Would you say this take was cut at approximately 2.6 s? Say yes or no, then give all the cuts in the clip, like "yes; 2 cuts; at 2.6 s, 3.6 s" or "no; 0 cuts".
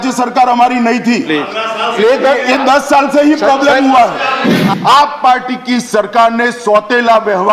no; 1 cut; at 4.5 s